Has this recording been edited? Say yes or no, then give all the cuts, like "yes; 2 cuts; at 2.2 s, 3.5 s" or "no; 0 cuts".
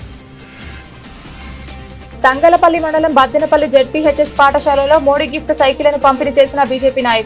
yes; 2 cuts; at 1.0 s, 2.1 s